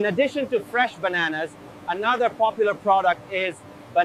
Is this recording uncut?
yes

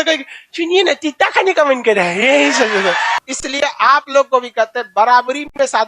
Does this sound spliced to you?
yes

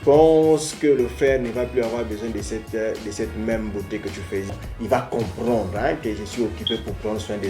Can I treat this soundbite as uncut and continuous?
no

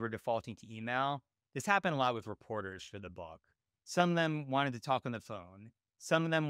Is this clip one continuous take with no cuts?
yes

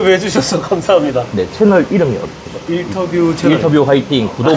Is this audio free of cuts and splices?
yes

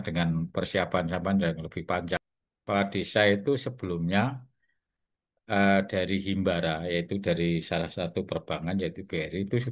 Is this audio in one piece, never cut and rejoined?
no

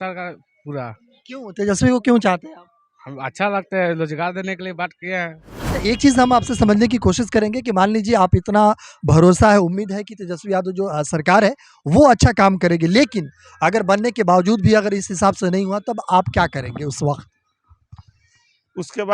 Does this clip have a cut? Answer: yes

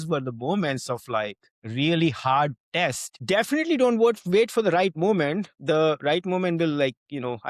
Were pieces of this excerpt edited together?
yes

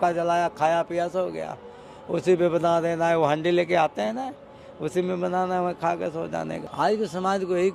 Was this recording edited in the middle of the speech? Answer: no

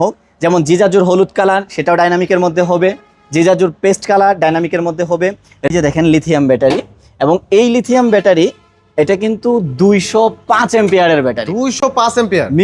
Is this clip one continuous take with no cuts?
no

